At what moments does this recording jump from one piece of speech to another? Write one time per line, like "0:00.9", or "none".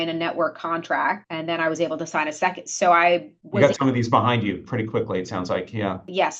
none